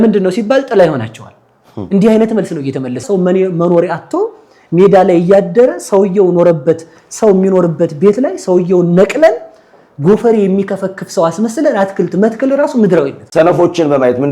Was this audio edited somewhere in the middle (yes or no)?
yes